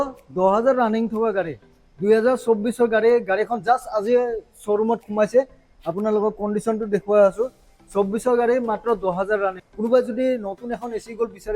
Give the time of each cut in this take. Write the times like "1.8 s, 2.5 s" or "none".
9.6 s